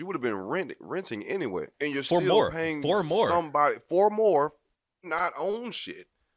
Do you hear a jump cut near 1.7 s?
yes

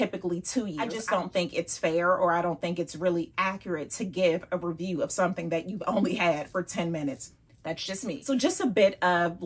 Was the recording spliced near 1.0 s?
yes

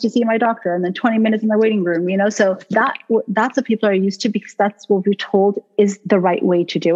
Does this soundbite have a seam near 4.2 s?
no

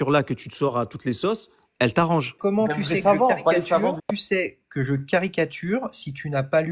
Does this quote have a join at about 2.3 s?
yes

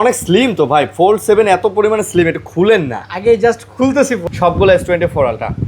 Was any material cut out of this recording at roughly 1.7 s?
no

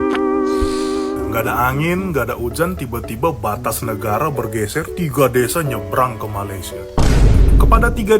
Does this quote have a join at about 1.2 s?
yes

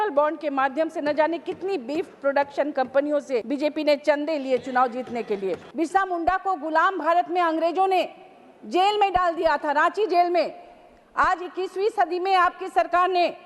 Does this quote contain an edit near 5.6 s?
yes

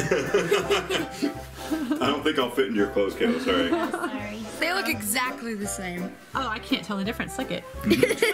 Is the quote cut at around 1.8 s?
no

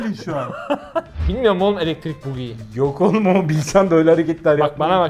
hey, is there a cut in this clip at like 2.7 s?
no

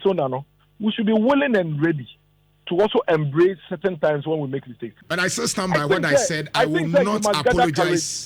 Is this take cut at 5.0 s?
yes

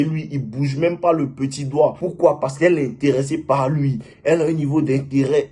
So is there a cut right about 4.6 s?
no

